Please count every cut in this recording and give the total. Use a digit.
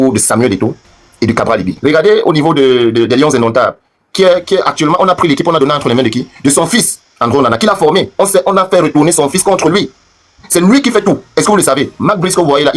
1